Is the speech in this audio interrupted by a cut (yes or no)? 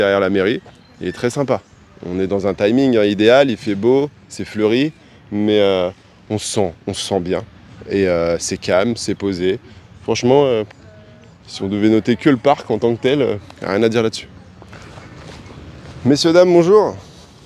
no